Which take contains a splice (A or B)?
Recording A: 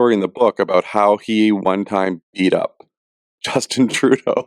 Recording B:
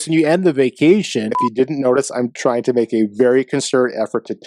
B